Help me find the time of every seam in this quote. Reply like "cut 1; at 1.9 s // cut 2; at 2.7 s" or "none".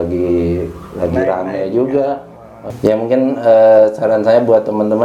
cut 1; at 2.7 s